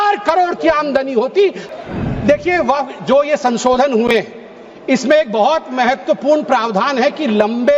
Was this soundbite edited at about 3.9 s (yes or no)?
no